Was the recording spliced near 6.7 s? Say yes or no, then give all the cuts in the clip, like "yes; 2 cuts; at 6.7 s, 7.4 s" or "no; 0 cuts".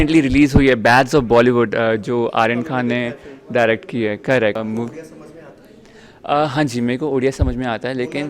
no; 1 cut; at 4.6 s